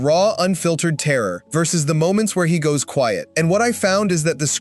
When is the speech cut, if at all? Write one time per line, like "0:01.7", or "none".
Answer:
0:01.4
0:03.3

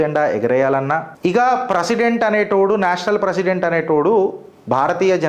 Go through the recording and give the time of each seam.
0:01.1

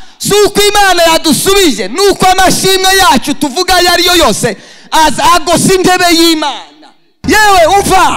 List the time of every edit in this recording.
0:07.1

